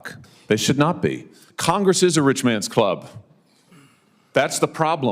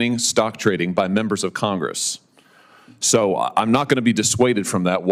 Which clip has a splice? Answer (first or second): first